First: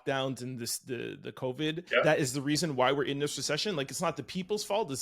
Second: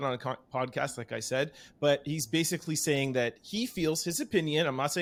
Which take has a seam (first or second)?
first